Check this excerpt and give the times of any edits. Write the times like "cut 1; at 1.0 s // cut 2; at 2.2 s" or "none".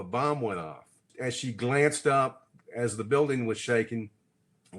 cut 1; at 1.1 s